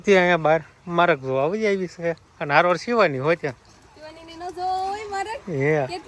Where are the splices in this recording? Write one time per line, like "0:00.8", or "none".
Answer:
none